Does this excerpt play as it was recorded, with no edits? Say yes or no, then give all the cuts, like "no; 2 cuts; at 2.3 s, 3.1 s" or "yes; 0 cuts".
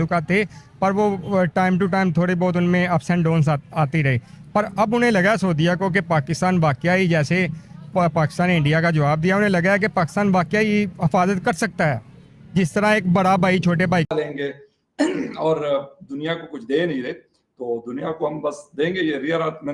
no; 1 cut; at 14.1 s